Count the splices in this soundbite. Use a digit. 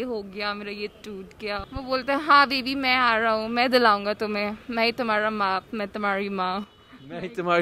1